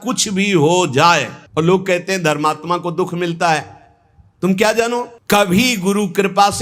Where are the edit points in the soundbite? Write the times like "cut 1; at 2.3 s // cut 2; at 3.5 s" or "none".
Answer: cut 1; at 1.4 s // cut 2; at 5.1 s